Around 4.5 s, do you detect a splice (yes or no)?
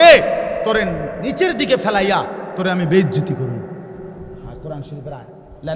yes